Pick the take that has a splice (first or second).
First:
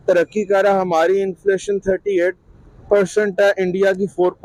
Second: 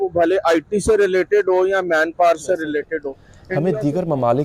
second